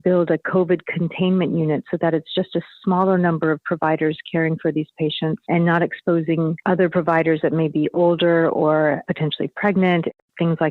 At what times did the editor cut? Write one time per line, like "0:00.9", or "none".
0:05.4
0:06.6
0:09.0